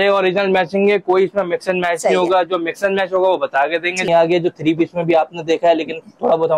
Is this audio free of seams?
no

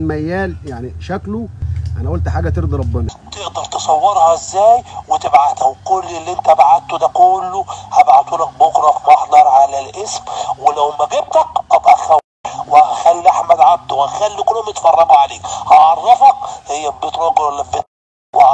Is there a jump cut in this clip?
yes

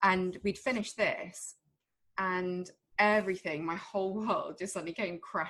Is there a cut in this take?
no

